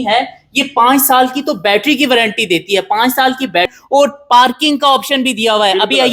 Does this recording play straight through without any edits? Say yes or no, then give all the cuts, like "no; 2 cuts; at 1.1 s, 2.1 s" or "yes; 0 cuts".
no; 1 cut; at 3.8 s